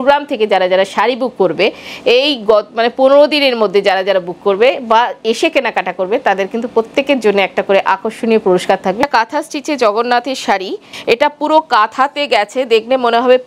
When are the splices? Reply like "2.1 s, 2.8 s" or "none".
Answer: 9.1 s, 10.9 s